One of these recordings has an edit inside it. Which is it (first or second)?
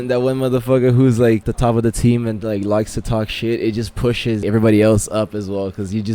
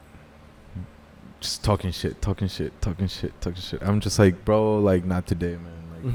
first